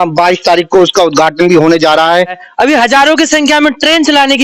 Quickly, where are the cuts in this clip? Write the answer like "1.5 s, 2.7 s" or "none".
2.4 s